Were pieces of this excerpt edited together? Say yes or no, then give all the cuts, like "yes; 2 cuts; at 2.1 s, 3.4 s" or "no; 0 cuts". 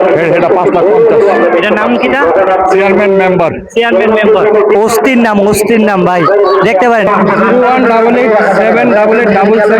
yes; 1 cut; at 7.1 s